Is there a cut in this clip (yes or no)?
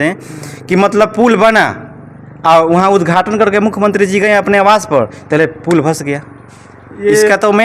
no